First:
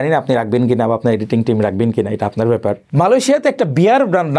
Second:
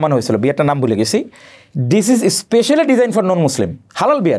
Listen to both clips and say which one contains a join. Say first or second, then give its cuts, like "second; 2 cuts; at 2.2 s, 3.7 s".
first; 1 cut; at 2.8 s